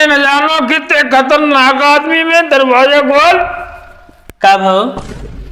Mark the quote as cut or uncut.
uncut